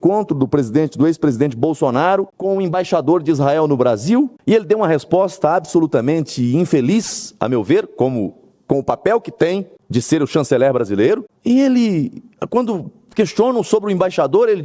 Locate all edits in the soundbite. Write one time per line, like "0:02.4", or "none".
0:02.5
0:04.4
0:09.8
0:11.3

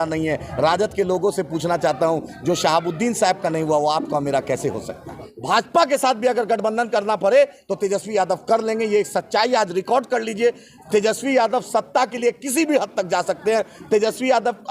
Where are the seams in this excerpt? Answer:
0:05.3

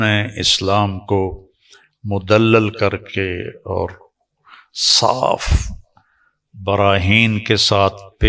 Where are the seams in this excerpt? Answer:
none

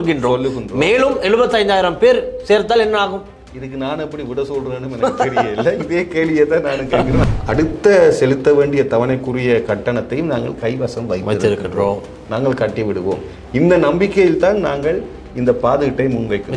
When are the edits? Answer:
0:07.2

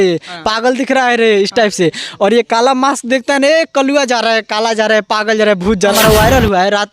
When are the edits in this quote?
0:05.9

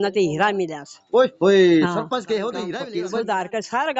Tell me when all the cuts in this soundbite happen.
0:02.6

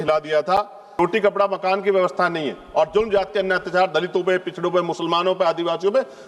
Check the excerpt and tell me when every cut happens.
0:00.9

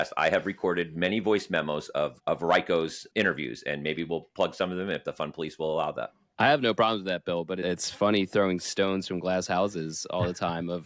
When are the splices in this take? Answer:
0:06.2

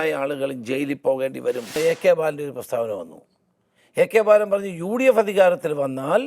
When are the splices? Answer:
0:01.8

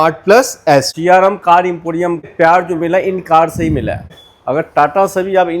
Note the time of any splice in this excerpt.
0:00.9
0:02.3
0:04.1

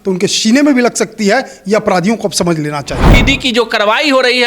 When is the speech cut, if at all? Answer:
0:03.0

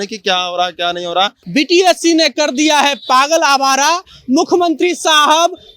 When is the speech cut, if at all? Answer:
0:01.4

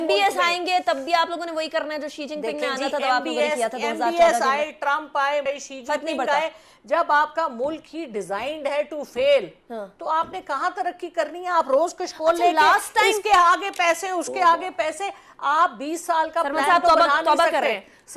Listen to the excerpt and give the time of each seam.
none

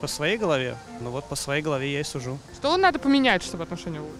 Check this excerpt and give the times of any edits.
0:00.9
0:02.5

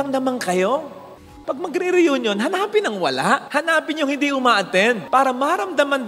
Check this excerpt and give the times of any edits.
0:01.3
0:05.0

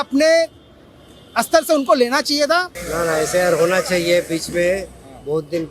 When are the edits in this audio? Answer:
0:02.8

